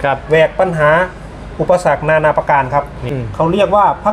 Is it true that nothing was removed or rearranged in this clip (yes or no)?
no